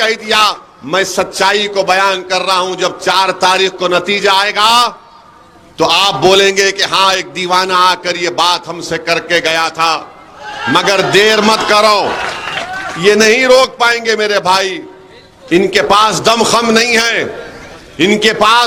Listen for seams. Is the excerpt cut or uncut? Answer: uncut